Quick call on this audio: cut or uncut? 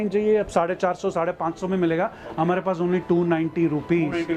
uncut